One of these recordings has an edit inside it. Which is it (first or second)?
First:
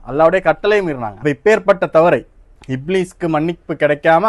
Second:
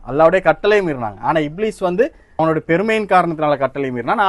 first